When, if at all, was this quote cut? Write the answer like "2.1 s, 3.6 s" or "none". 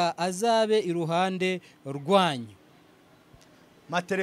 none